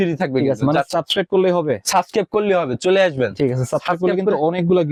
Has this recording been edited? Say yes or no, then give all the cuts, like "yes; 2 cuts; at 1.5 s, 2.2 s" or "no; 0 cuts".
no; 0 cuts